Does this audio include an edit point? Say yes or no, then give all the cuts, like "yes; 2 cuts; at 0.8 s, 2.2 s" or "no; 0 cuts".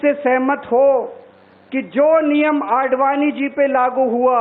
no; 0 cuts